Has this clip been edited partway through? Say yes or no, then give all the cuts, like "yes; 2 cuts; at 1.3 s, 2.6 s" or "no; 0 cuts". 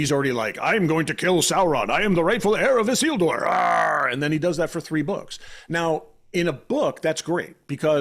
no; 0 cuts